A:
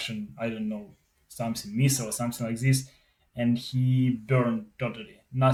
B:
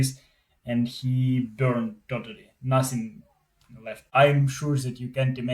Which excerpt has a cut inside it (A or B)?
B